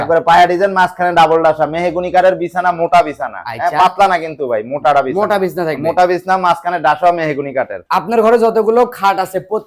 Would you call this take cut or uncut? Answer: uncut